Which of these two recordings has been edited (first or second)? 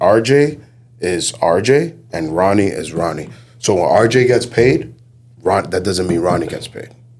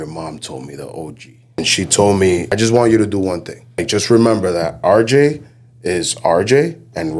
second